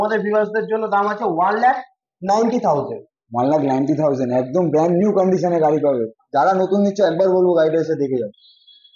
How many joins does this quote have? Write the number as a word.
zero